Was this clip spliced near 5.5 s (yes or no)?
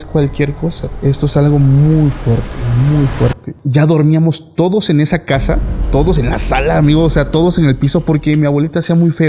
no